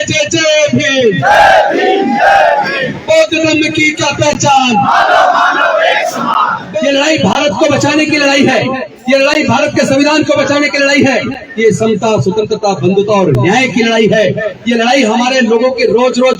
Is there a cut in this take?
yes; 1 cut; at 6.6 s

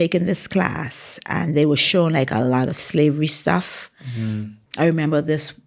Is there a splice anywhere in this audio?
yes; 1 cut; at 4.5 s

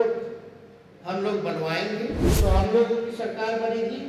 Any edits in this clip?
yes; 1 cut; at 2.3 s

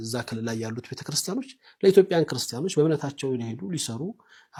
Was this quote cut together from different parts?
no; 0 cuts

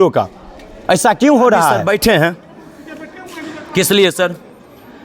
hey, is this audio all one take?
no; 1 cut; at 1.8 s

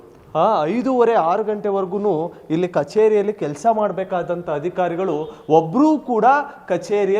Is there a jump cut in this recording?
no; 0 cuts

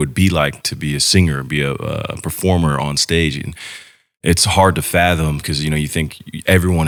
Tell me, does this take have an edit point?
no; 0 cuts

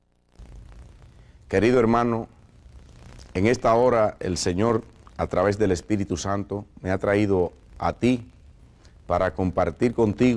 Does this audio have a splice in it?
yes; 1 cut; at 5.8 s

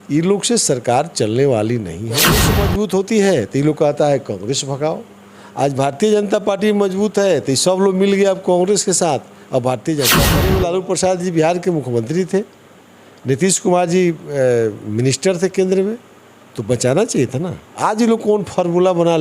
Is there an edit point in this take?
yes; 2 cuts; at 2.5 s, 10.4 s

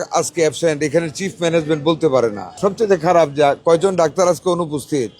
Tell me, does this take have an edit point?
yes; 1 cut; at 2.5 s

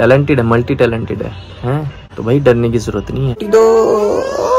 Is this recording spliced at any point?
yes; 1 cut; at 3.4 s

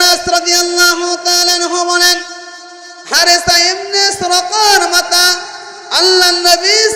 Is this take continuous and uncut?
yes; 0 cuts

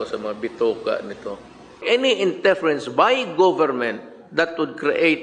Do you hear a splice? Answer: yes; 1 cut; at 1.8 s

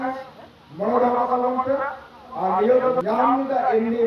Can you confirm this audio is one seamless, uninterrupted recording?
no; 1 cut; at 3.0 s

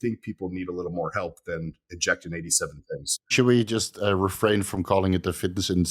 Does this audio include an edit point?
yes; 1 cut; at 3.3 s

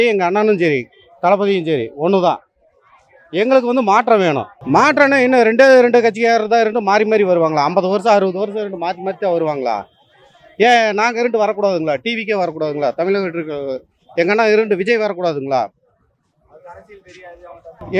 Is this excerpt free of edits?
yes; 0 cuts

